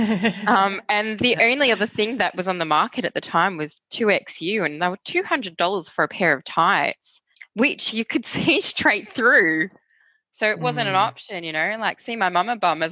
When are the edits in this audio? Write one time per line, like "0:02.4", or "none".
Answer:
none